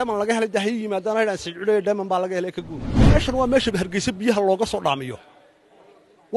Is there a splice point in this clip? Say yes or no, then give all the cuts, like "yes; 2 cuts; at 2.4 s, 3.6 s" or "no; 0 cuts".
yes; 1 cut; at 3.0 s